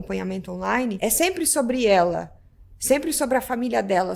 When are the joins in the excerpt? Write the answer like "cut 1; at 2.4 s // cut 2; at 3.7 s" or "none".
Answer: cut 1; at 1.0 s